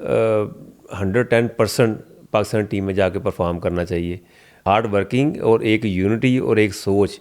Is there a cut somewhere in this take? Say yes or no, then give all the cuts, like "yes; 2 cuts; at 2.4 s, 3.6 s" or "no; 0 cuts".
yes; 1 cut; at 4.6 s